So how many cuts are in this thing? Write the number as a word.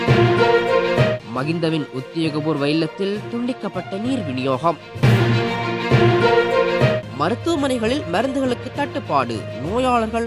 one